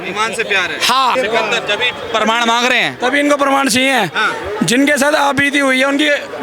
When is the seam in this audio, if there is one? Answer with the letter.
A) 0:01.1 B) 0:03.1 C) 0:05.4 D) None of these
A